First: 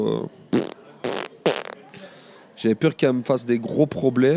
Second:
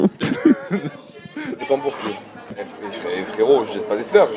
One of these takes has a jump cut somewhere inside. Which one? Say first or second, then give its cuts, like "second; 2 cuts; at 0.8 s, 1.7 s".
second; 1 cut; at 2.6 s